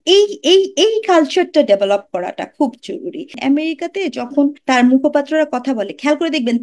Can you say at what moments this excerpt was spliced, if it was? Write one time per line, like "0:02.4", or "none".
0:03.4
0:04.6